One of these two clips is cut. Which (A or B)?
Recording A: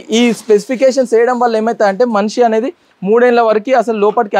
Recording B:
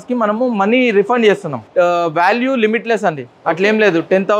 B